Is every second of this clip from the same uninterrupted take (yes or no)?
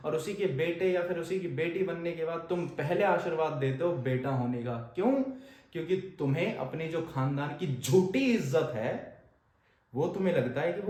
yes